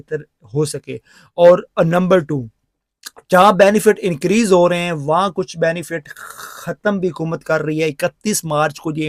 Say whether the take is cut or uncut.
uncut